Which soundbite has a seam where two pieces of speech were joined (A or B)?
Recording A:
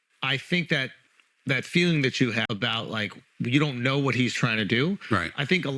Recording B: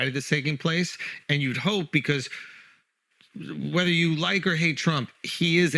A